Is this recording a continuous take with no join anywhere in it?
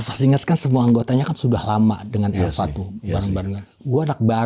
yes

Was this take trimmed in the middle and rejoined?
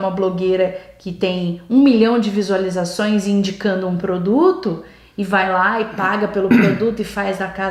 no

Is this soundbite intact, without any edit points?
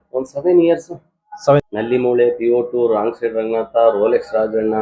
no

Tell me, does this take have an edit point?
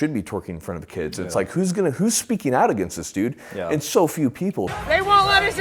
no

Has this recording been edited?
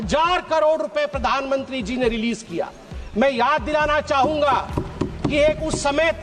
no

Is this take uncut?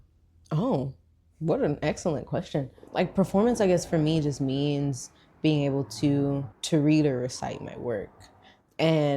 no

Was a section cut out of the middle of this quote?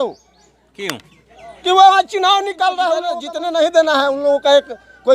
yes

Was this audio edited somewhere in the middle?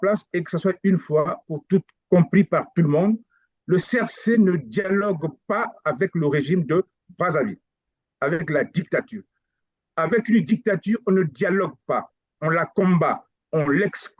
no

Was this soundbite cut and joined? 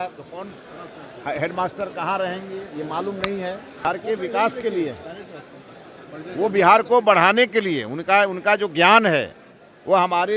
yes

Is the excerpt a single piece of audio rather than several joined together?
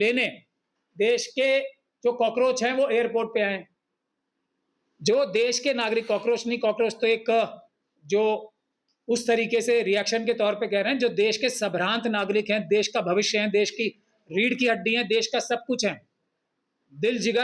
yes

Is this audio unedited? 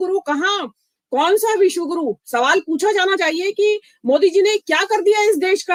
yes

